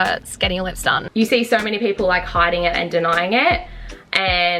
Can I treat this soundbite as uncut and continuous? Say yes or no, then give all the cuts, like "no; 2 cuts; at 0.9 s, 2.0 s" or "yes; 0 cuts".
no; 1 cut; at 1.0 s